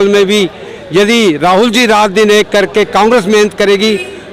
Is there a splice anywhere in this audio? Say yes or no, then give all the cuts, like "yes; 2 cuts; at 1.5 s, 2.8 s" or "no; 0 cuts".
no; 0 cuts